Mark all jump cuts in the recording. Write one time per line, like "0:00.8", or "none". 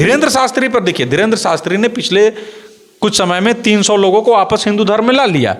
none